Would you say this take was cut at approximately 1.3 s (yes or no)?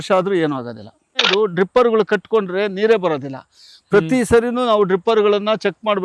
yes